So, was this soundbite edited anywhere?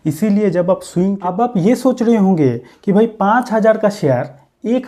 yes; 1 cut; at 1.2 s

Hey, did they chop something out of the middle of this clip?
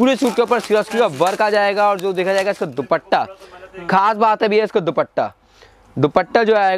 no; 0 cuts

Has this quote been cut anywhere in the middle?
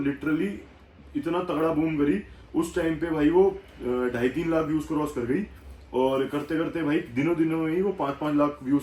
no; 0 cuts

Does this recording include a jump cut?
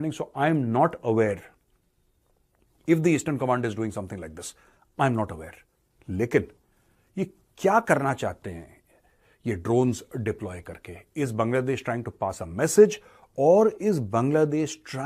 no; 0 cuts

